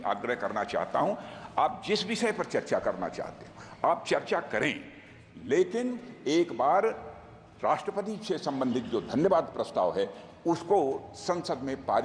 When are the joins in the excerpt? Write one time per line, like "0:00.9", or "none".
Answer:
none

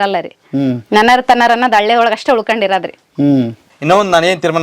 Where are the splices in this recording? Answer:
0:03.7

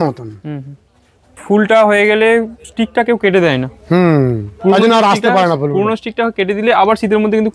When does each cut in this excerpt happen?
0:01.3

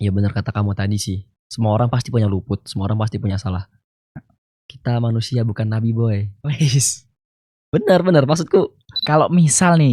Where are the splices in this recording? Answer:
0:08.9

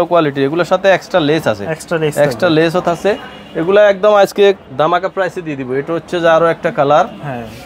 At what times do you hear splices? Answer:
none

